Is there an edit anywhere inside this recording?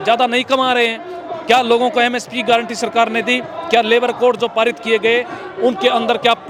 no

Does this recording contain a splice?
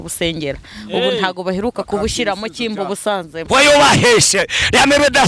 yes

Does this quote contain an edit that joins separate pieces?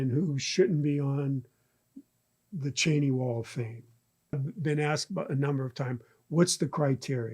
yes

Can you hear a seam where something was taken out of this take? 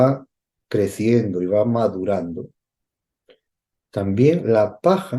no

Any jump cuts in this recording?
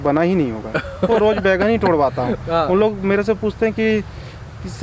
yes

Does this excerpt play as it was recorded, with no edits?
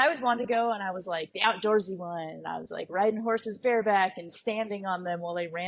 yes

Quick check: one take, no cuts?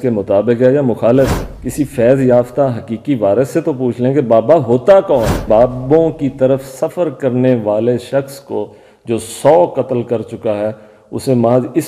no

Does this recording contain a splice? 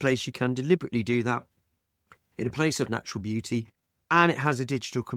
no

